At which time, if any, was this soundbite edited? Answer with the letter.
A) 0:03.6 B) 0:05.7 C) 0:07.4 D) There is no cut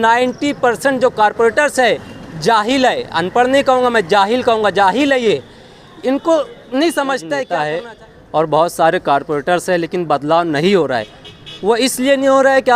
C